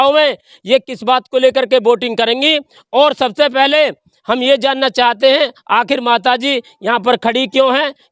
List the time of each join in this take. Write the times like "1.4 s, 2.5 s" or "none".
none

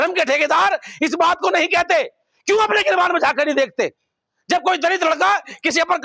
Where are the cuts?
none

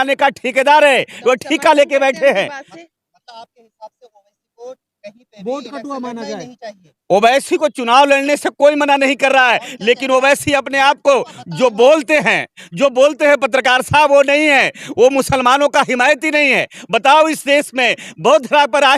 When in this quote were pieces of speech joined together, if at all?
none

